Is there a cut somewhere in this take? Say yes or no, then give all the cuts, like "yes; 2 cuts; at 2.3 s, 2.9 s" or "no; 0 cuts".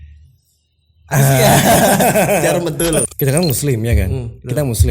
yes; 1 cut; at 3.0 s